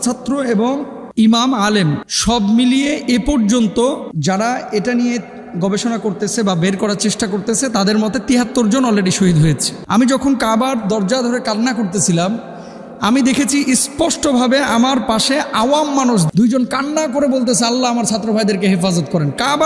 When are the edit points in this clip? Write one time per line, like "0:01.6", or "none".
0:09.7
0:16.3